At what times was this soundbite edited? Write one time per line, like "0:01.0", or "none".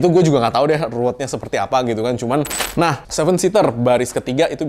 0:02.5